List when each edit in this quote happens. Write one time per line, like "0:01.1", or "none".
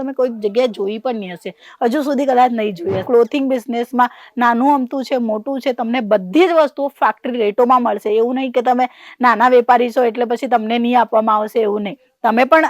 0:03.0